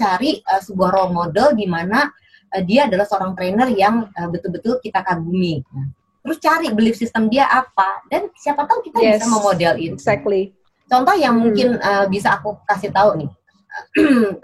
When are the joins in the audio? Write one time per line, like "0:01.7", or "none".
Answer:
none